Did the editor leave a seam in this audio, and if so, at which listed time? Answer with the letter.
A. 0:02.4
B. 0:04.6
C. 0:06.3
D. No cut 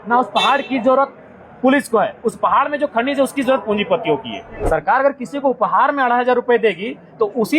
B